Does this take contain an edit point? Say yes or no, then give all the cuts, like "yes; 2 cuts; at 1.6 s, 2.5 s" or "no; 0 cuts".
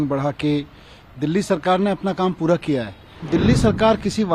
yes; 1 cut; at 3.3 s